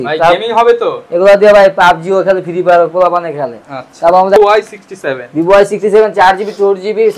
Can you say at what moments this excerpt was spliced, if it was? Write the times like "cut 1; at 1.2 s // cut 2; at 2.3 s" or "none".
cut 1; at 4.4 s